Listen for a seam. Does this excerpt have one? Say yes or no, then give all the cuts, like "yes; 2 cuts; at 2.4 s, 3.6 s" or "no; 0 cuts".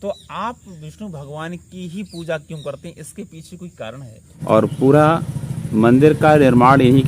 yes; 1 cut; at 4.4 s